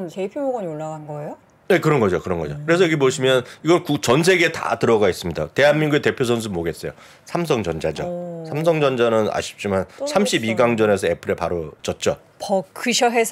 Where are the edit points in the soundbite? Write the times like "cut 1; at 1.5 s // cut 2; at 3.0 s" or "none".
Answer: cut 1; at 11.7 s